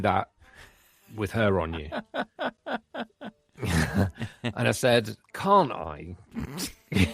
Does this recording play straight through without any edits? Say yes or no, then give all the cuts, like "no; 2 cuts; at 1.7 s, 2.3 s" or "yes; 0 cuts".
no; 1 cut; at 5.2 s